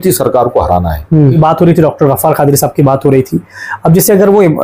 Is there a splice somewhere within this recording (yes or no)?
yes